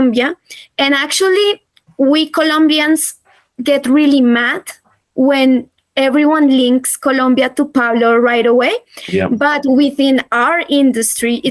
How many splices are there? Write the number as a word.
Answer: zero